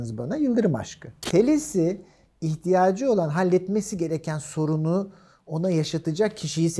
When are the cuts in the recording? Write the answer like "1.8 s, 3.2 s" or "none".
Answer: 1.2 s